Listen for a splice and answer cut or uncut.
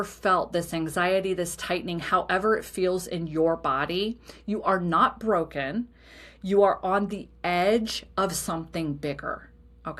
uncut